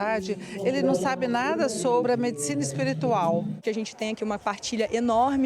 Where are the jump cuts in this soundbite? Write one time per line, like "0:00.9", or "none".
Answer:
0:02.0
0:03.6

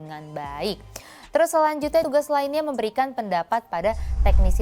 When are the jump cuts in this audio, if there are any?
0:02.1

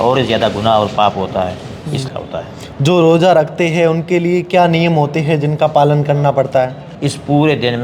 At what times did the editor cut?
0:02.0
0:06.9

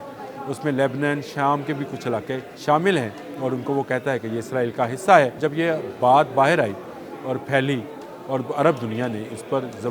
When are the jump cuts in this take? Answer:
0:02.5
0:05.4

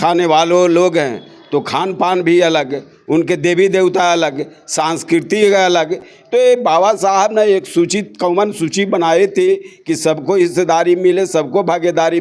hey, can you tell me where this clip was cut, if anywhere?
none

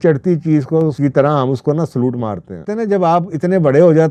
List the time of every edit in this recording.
0:00.9
0:02.7

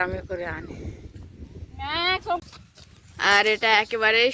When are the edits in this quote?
0:02.4

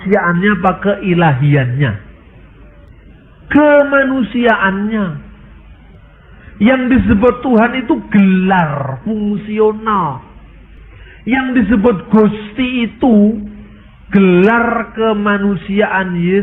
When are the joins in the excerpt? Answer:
none

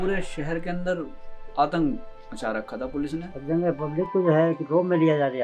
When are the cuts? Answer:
0:03.3

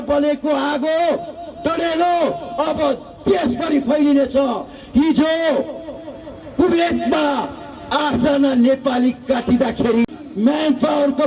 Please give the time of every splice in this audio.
none

